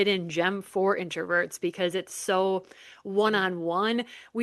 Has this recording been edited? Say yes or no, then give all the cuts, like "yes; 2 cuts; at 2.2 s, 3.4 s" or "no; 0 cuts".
no; 0 cuts